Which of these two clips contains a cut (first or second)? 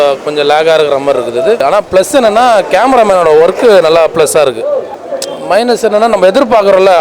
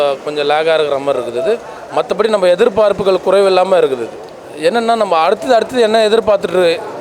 first